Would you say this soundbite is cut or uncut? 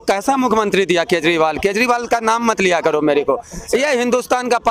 uncut